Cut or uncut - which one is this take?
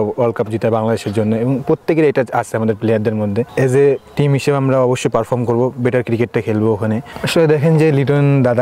cut